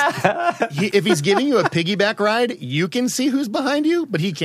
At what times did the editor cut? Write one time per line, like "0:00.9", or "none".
0:00.9